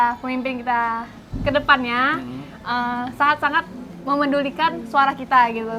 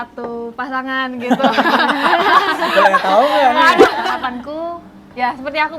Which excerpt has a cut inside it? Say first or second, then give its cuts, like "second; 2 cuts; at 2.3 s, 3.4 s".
second; 1 cut; at 4.0 s